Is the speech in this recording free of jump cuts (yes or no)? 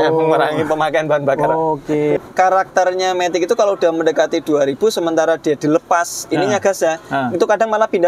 no